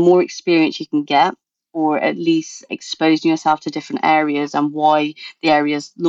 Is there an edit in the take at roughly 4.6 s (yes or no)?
no